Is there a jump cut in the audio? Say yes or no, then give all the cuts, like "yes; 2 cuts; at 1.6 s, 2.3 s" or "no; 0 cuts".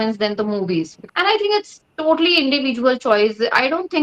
yes; 1 cut; at 0.9 s